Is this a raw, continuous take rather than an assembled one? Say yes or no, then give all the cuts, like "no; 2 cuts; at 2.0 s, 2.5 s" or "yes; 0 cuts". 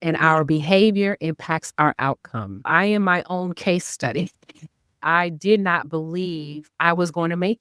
no; 1 cut; at 5.0 s